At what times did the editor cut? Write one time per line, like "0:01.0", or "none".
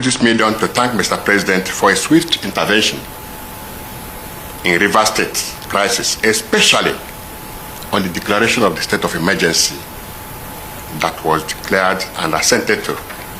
none